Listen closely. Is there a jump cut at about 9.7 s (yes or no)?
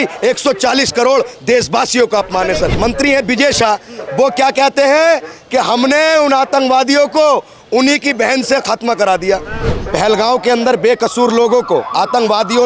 yes